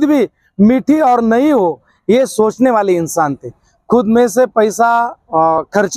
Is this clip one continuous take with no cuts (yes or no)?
yes